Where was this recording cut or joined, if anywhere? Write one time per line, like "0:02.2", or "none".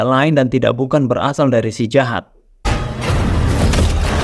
0:02.7